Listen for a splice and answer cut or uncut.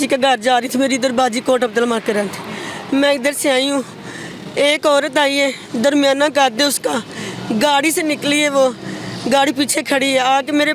uncut